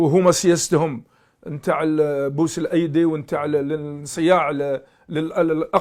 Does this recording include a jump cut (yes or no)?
no